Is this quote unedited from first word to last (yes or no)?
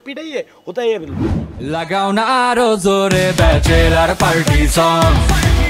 no